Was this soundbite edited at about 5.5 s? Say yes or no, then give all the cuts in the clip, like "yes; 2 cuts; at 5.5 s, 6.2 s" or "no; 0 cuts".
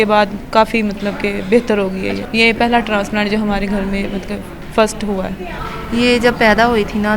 yes; 2 cuts; at 2.2 s, 5.5 s